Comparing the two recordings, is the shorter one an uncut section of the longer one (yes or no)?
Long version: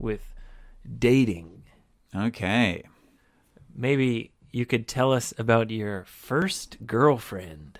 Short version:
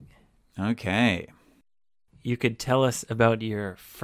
no